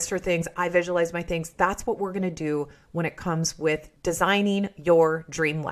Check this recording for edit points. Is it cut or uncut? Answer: cut